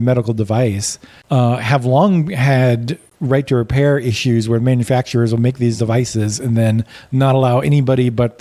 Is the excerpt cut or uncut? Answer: uncut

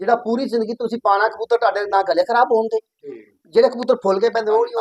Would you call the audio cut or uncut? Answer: uncut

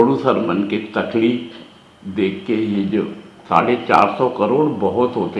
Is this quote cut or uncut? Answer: uncut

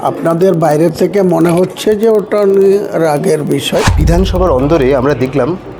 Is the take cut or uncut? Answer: cut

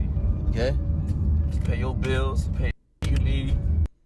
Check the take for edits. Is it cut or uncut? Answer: uncut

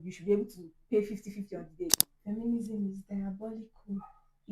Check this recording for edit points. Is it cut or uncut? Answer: cut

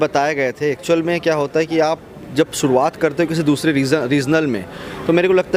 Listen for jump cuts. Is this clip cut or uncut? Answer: uncut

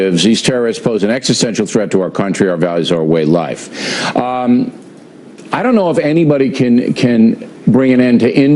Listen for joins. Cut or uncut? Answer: cut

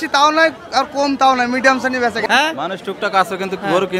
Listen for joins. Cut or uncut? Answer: cut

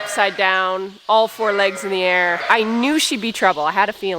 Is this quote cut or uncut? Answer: cut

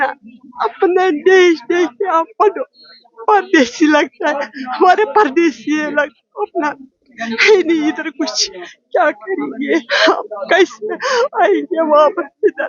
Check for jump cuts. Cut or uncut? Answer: uncut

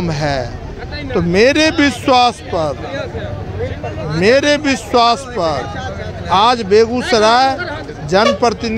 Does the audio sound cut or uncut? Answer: uncut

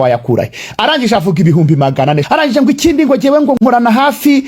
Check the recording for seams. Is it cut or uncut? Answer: cut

